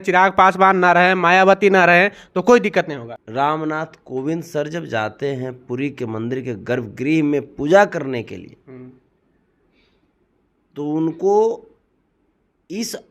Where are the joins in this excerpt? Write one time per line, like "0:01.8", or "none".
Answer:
0:03.1